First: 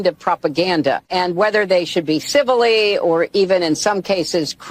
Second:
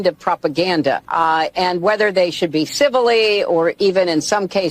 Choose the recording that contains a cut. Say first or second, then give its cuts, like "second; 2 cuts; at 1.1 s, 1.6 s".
first; 1 cut; at 1.0 s